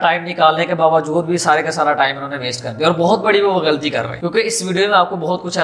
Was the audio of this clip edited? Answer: yes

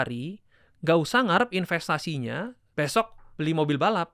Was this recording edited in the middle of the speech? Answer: yes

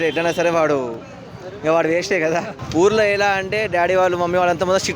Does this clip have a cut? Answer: yes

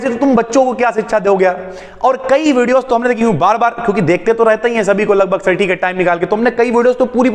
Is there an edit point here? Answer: no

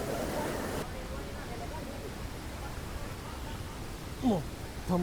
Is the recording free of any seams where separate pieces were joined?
yes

